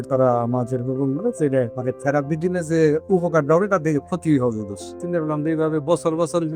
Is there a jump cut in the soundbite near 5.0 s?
yes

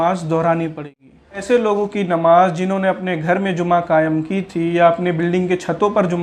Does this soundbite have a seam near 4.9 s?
no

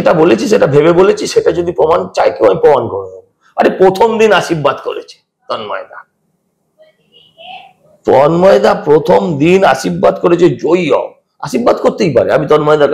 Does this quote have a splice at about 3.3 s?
no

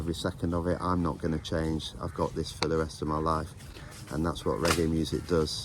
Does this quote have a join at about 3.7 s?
no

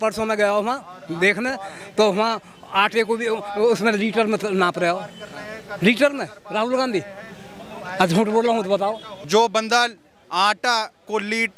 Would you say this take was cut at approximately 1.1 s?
no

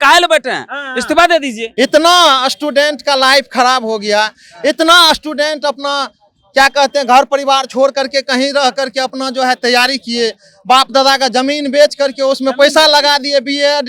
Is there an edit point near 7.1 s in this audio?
no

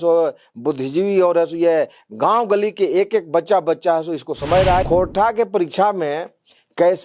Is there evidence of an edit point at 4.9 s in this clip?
yes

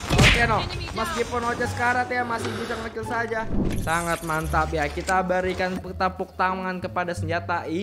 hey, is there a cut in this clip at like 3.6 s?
yes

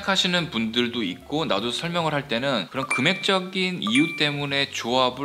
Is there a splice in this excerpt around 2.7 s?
yes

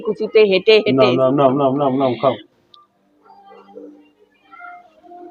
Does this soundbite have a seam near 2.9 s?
no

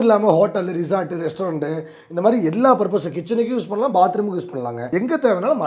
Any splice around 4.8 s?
yes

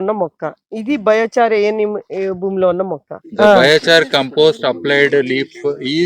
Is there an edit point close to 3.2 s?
yes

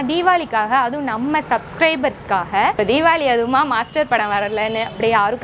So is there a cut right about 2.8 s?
yes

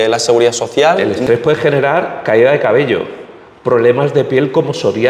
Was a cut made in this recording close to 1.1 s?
yes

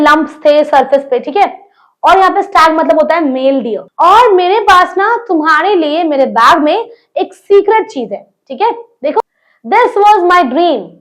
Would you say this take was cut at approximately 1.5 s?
no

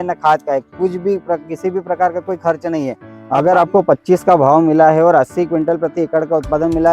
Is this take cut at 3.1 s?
yes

